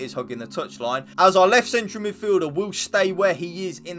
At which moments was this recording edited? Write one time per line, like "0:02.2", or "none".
0:01.1